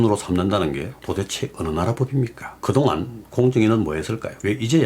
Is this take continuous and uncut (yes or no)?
no